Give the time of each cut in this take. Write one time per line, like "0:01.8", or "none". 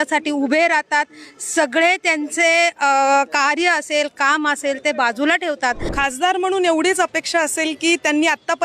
0:05.9